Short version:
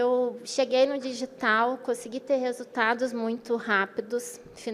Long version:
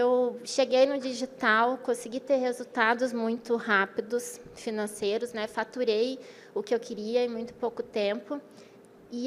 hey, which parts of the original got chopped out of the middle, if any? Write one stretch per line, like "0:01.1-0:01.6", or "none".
none